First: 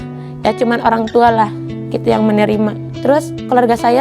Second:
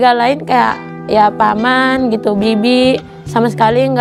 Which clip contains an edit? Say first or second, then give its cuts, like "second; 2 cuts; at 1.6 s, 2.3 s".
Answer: first; 1 cut; at 2.9 s